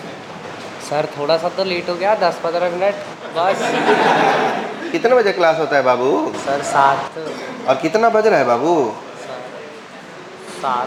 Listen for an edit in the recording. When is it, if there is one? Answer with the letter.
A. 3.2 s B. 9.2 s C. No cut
C